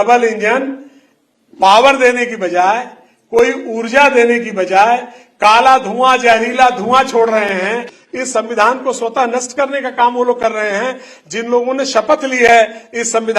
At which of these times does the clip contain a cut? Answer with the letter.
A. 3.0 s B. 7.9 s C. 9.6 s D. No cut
B